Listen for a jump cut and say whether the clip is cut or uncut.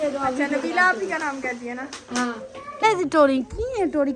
cut